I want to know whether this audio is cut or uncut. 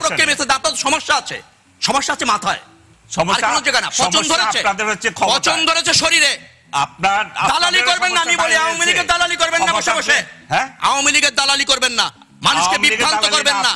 uncut